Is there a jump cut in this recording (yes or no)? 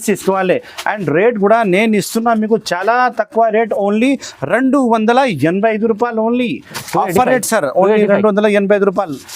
no